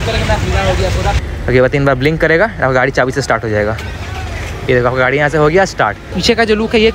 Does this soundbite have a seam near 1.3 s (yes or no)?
yes